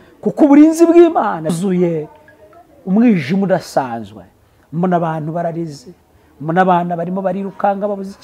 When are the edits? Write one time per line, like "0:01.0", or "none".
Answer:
0:01.5